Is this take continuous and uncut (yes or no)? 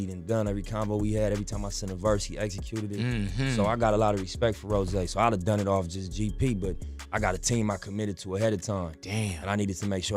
no